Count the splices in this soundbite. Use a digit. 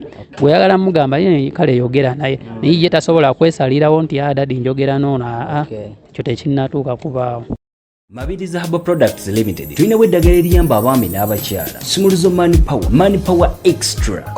1